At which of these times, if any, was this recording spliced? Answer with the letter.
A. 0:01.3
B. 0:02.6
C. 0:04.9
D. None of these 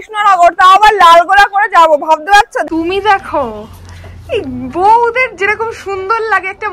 B